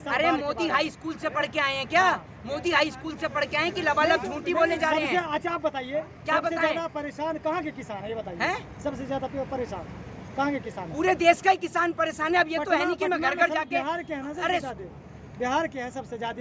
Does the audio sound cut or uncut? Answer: uncut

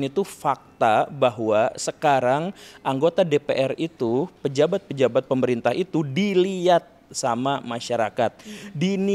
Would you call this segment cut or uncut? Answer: uncut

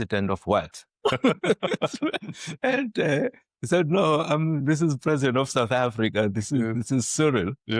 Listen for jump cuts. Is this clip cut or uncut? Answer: uncut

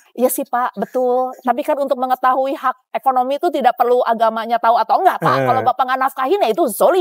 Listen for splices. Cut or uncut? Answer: uncut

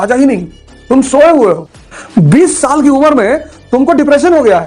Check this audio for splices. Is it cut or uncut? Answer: cut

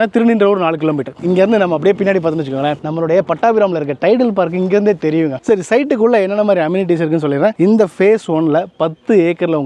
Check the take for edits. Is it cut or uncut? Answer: cut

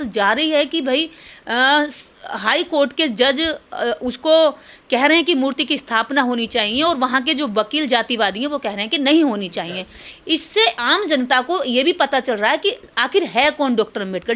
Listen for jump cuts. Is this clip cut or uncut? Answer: uncut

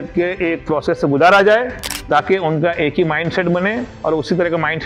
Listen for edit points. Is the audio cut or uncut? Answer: uncut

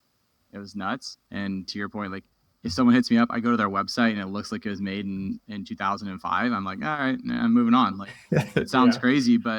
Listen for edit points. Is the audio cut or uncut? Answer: cut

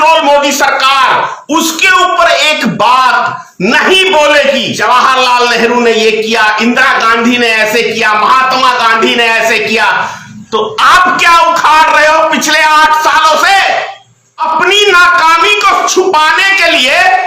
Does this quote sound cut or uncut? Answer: cut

